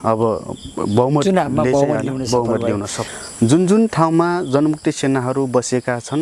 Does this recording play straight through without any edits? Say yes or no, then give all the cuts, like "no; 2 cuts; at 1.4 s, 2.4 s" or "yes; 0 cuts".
no; 1 cut; at 3.0 s